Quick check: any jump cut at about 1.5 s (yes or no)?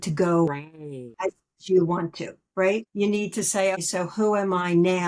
yes